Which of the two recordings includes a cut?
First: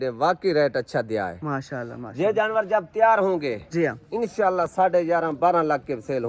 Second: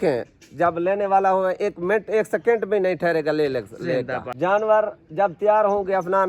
second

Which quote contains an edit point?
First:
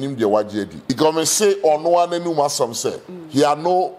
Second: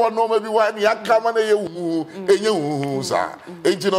first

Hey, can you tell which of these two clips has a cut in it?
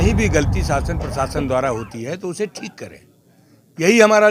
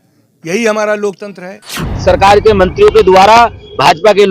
second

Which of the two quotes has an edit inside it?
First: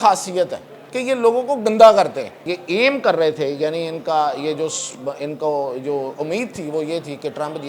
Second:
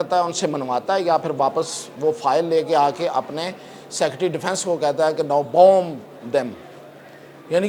first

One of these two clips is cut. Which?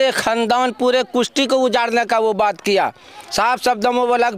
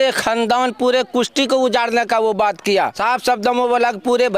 second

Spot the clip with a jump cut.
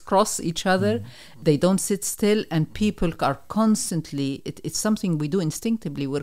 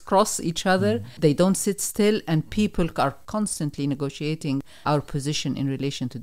second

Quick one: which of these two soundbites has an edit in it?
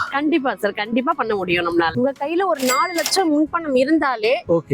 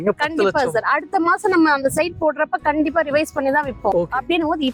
first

